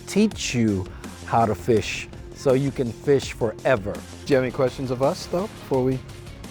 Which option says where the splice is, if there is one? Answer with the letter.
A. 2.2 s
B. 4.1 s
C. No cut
B